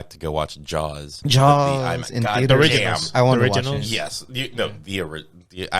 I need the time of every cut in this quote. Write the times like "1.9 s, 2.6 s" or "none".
1.1 s

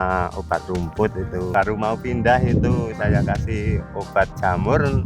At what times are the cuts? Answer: 1.4 s

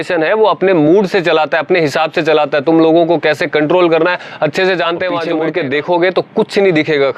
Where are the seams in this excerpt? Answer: 5.3 s

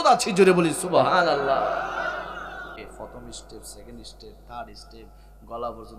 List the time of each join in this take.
2.8 s

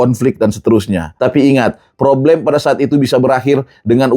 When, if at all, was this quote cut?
1.0 s

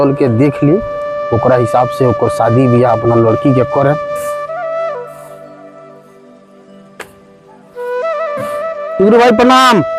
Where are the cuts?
none

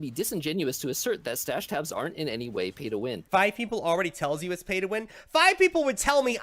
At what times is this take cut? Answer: 3.2 s

